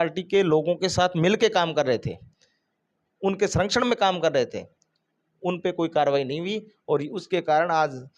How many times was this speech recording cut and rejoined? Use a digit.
0